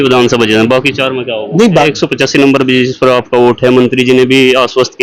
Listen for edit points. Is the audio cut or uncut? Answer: cut